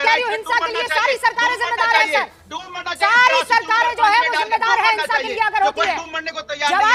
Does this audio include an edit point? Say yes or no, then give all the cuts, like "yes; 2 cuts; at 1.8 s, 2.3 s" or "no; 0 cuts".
no; 0 cuts